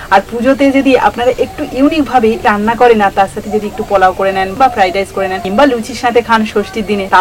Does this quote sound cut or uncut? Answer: cut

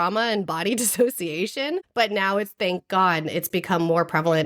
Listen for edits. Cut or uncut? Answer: cut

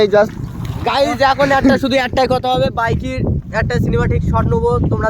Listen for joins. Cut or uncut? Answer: cut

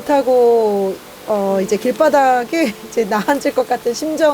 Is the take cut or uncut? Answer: uncut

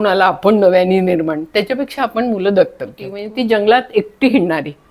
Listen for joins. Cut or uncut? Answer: cut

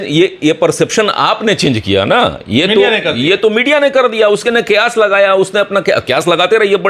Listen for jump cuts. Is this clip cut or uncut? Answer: uncut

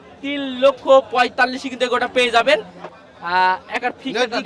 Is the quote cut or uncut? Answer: cut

